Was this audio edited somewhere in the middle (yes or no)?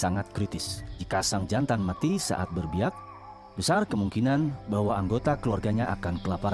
no